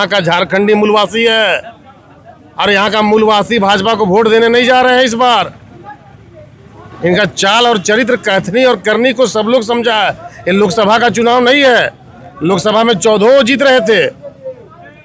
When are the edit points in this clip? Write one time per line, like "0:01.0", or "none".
none